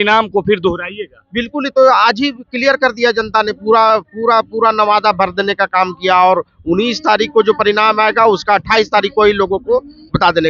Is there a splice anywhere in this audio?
no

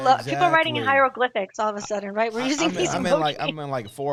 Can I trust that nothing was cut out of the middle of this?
yes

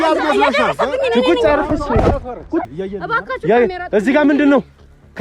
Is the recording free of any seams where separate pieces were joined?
no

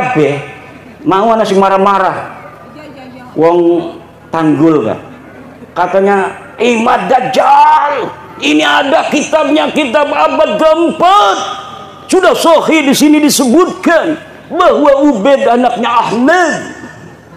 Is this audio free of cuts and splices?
yes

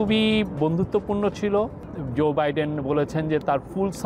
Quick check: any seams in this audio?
no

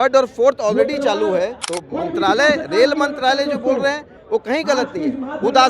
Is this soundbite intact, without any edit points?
no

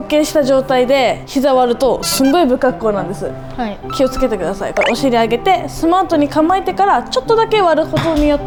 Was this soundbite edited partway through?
no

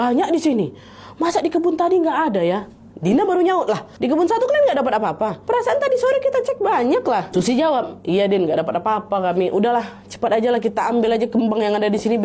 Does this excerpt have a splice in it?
no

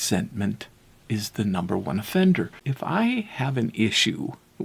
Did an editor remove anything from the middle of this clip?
yes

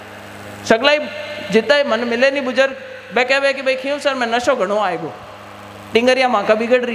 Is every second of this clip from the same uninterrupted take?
yes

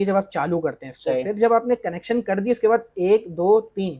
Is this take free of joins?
yes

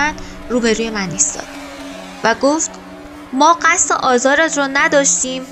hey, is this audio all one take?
yes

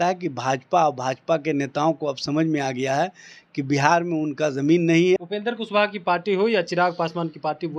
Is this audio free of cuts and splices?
no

